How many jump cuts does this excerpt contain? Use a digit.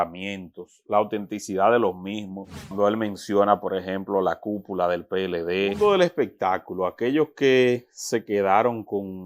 2